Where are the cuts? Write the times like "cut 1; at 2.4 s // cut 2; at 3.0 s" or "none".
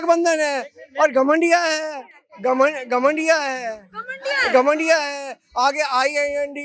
none